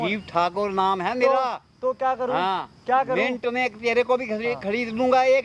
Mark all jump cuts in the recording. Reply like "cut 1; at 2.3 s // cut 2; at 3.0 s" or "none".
none